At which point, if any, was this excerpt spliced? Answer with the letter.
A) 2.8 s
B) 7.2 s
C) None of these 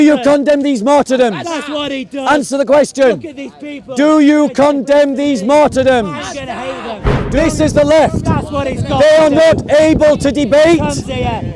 B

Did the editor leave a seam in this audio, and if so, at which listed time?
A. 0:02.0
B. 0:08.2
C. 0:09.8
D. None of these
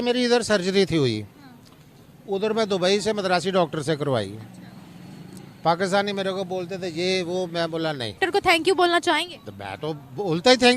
B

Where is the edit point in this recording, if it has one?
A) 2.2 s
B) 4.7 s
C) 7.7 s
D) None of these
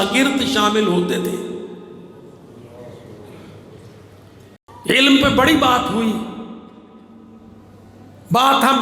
B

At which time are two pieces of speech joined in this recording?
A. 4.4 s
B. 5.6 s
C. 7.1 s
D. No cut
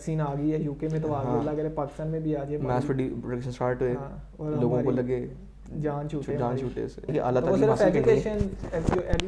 C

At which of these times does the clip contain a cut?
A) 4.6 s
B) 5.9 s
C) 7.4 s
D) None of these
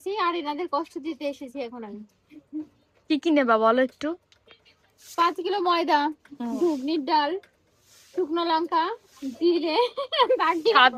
D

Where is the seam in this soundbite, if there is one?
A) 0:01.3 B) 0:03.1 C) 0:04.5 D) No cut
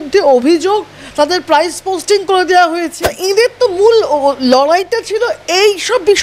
B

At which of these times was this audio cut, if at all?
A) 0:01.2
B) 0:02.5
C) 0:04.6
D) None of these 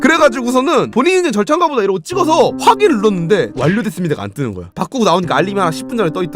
C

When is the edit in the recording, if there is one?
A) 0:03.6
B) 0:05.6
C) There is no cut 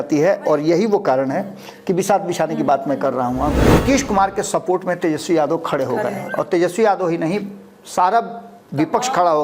A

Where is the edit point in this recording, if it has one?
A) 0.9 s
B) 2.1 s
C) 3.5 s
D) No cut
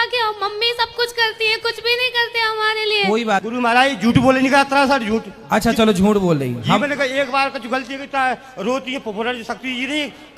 C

